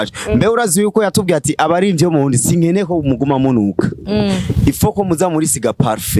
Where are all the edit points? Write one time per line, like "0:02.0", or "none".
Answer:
none